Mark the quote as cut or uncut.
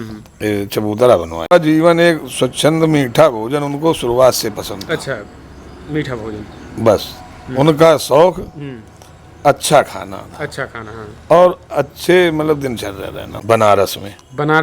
cut